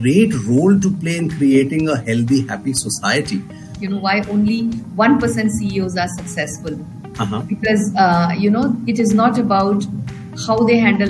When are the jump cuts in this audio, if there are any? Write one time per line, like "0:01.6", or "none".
0:03.8

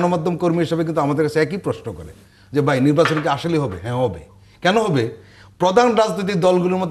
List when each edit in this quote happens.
none

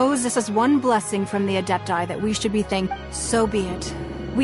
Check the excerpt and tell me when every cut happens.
0:02.9

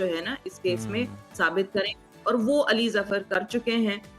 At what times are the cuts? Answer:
none

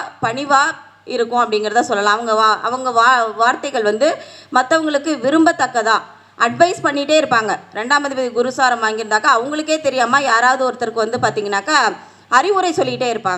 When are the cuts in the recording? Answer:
none

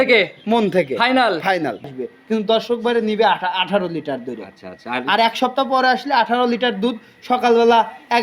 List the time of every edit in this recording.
0:01.9

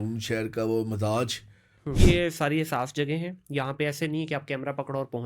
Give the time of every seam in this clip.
0:02.0

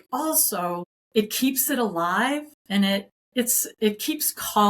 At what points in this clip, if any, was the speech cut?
0:01.0
0:03.2

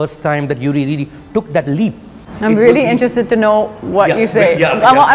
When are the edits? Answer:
none

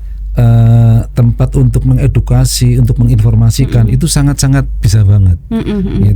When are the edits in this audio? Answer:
none

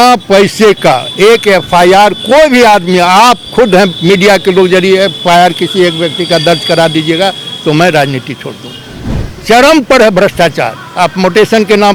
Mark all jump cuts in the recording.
none

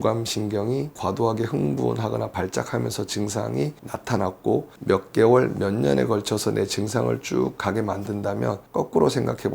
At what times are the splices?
0:01.0
0:03.9
0:08.6

